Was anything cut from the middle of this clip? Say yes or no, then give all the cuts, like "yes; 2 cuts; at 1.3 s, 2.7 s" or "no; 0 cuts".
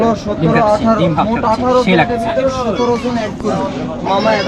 no; 0 cuts